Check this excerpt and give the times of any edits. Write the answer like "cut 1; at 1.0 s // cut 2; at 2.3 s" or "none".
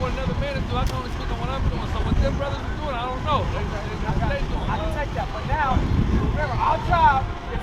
none